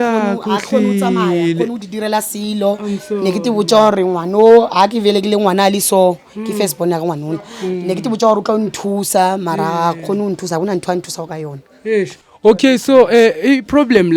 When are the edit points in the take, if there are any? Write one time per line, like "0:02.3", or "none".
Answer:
none